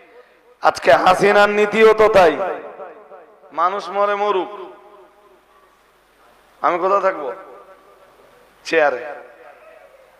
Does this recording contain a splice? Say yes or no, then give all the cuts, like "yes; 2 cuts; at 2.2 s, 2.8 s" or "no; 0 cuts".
no; 0 cuts